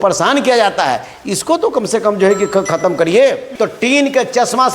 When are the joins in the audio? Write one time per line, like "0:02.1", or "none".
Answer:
0:03.5